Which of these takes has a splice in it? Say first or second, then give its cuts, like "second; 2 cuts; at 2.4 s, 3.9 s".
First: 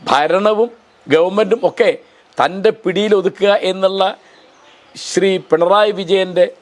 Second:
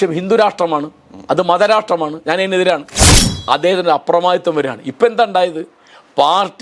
second; 1 cut; at 3.3 s